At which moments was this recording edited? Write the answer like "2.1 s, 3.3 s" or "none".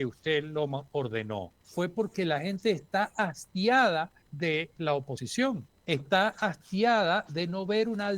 1.6 s, 4.2 s, 5.3 s

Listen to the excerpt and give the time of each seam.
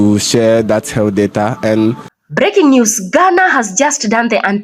2.1 s

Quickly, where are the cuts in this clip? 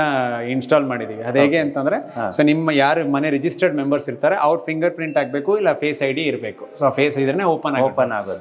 none

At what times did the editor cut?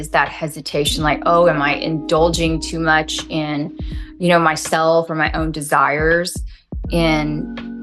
none

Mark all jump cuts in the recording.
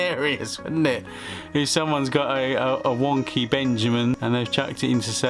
4.1 s

